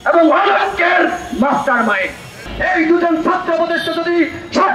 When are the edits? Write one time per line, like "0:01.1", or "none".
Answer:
0:02.5